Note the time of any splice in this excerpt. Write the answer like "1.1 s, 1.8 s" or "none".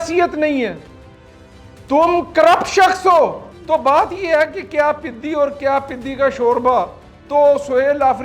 3.5 s